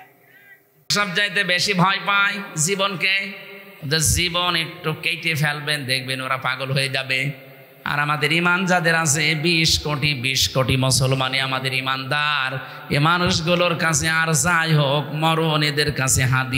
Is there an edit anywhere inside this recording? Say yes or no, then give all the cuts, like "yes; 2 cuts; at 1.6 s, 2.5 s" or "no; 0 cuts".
no; 0 cuts